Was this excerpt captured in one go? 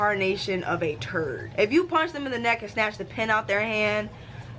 no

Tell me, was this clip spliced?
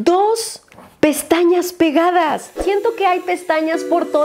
yes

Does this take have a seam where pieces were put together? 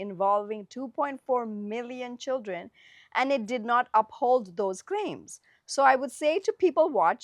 no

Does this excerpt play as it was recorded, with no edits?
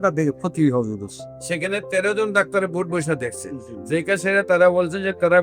yes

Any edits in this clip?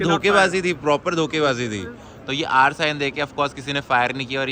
no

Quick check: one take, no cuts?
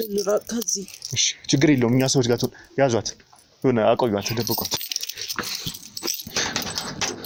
yes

